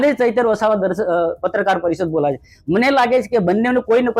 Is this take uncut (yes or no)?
yes